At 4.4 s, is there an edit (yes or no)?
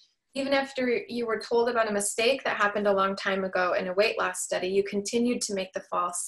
no